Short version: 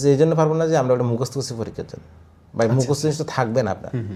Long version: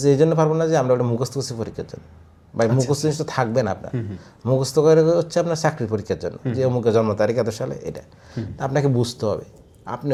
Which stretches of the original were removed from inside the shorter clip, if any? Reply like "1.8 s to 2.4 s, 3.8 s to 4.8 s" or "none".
none